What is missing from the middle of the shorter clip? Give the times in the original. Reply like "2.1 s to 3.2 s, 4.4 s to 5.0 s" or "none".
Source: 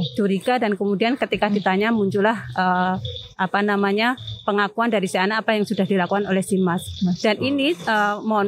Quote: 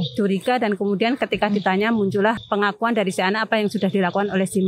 2.4 s to 4.4 s